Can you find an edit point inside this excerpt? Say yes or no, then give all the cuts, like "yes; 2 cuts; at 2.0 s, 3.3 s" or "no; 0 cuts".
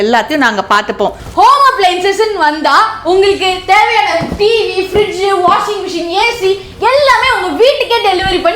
yes; 1 cut; at 1.2 s